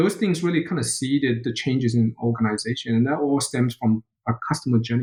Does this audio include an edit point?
no; 0 cuts

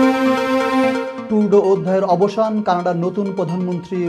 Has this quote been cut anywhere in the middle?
yes; 1 cut; at 1.1 s

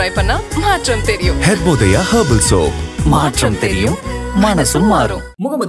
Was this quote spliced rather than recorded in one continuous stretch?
no; 0 cuts

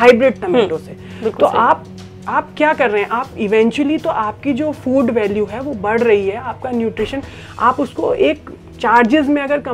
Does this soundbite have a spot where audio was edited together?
no; 0 cuts

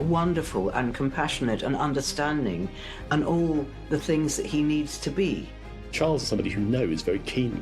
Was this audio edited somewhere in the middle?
yes; 1 cut; at 5.9 s

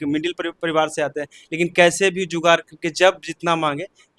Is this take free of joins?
yes; 0 cuts

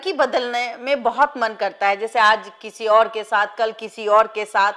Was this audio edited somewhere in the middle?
no; 0 cuts

